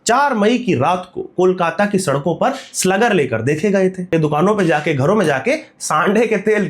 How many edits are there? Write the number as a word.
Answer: one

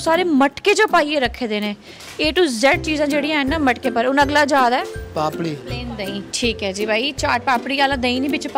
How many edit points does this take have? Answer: one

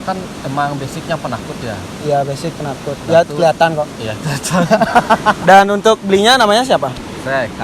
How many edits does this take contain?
one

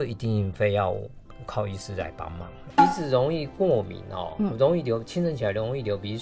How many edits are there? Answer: one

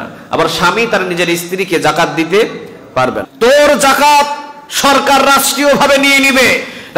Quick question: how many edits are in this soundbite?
one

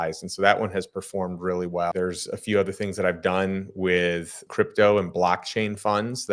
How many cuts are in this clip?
two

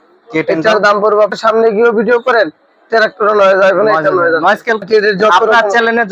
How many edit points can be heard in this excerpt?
two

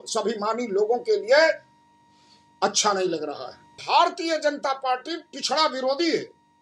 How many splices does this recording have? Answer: one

